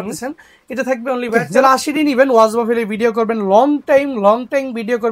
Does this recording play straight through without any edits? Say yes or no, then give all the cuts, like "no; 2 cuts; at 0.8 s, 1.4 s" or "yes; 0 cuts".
no; 1 cut; at 1.5 s